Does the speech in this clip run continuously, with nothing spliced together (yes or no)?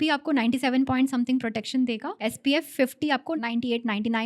no